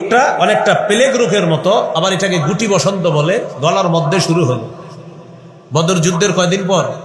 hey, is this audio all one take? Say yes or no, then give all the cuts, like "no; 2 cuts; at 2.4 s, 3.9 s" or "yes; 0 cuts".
yes; 0 cuts